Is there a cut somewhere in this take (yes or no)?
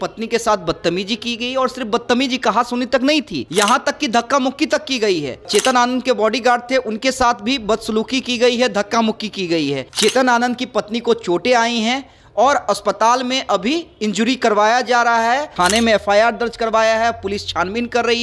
yes